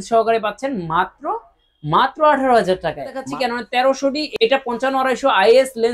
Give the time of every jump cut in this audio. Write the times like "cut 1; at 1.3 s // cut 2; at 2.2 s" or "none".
cut 1; at 3.1 s // cut 2; at 4.2 s